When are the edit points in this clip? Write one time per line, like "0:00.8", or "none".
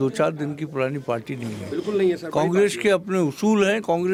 none